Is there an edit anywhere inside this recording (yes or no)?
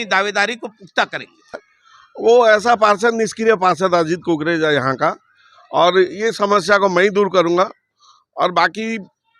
yes